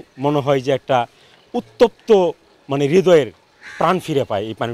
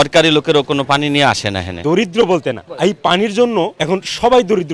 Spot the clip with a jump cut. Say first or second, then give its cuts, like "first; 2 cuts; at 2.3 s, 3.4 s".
second; 3 cuts; at 1.7 s, 2.7 s, 3.8 s